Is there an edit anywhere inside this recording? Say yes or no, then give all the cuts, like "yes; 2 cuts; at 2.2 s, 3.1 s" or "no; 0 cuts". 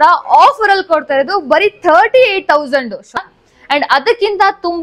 yes; 1 cut; at 3.2 s